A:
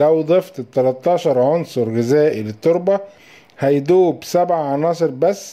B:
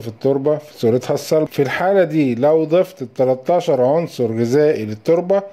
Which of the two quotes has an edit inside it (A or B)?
B